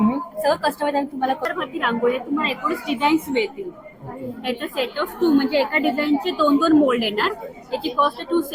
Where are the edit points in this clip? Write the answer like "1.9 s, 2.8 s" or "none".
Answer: 1.4 s